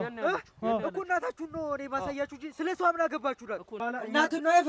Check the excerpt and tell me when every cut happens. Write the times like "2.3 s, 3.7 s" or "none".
3.7 s